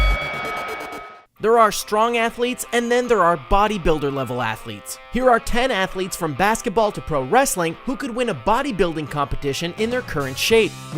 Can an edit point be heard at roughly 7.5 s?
no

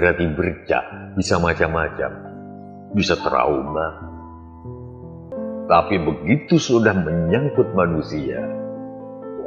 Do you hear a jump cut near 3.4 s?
no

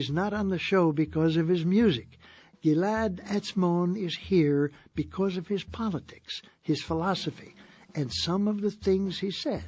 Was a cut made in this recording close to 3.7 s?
no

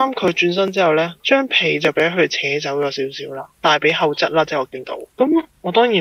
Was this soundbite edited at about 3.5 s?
yes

